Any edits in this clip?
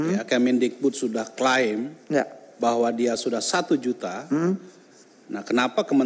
no; 0 cuts

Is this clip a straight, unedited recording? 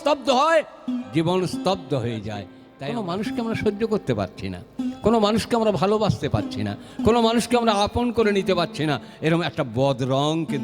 no; 1 cut; at 2.8 s

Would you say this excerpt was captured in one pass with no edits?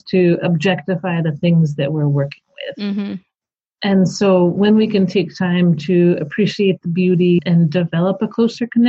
yes; 0 cuts

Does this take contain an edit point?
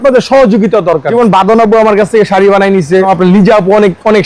yes; 2 cuts; at 1.1 s, 3.1 s

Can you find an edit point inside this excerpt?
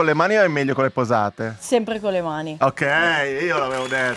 no; 0 cuts

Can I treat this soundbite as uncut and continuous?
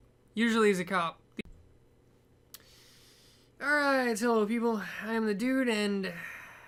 yes; 0 cuts

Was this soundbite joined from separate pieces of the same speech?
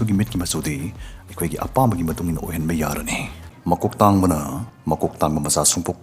yes; 2 cuts; at 3.5 s, 4.7 s

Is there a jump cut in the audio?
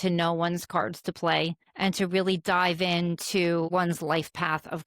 yes; 2 cuts; at 1.6 s, 3.7 s

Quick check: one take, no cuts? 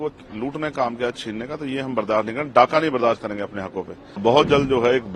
no; 1 cut; at 4.2 s

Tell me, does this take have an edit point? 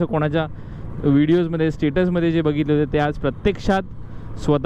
no; 0 cuts

